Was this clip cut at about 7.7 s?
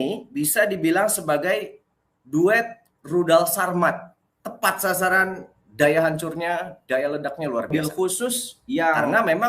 yes; 1 cut; at 7.7 s

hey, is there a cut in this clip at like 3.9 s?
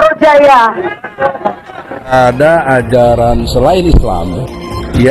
no; 1 cut; at 2.1 s

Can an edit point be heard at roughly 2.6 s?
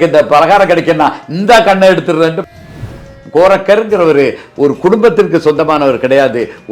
yes; 1 cut; at 2.6 s

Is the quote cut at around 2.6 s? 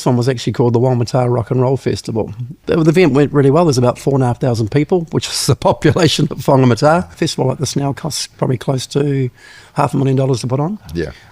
yes; 2 cuts; at 2.6 s, 7.1 s

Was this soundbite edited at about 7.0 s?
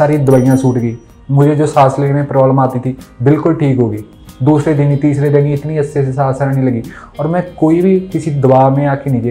no; 0 cuts

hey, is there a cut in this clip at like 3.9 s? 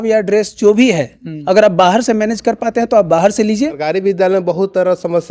yes; 1 cut; at 3.9 s

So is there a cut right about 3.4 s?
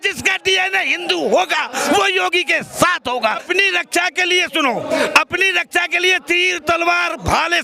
yes; 1 cut; at 3.4 s

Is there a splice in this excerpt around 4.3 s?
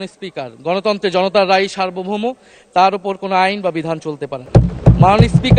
yes; 1 cut; at 4.3 s

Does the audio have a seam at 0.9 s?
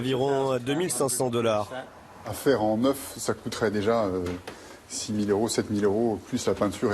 no; 1 cut; at 2.3 s

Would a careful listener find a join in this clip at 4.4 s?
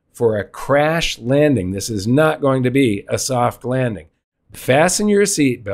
yes; 1 cut; at 4.4 s

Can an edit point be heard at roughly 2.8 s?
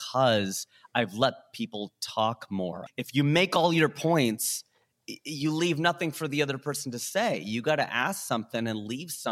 yes; 1 cut; at 2.8 s

